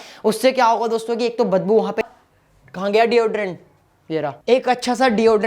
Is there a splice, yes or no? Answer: yes